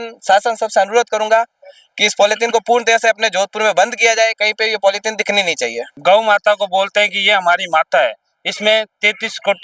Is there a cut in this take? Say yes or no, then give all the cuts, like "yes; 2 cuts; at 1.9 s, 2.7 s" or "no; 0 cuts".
yes; 1 cut; at 5.9 s